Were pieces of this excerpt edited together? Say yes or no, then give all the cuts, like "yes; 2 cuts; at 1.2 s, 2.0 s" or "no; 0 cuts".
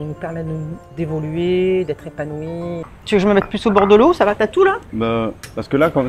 yes; 2 cuts; at 2.8 s, 4.9 s